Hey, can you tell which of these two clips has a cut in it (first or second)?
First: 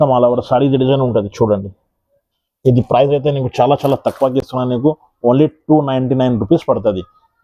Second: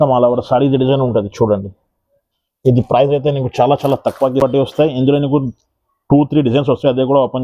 second